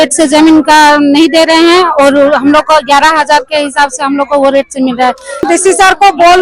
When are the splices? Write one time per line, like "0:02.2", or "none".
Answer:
0:05.5